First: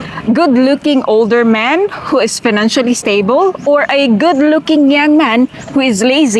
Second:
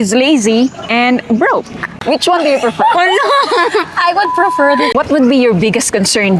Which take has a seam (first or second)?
second